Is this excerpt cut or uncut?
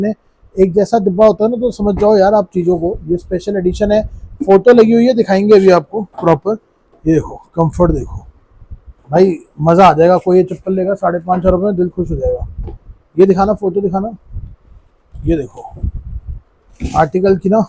uncut